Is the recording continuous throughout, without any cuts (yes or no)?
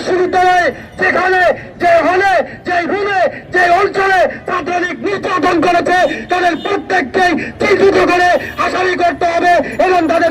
yes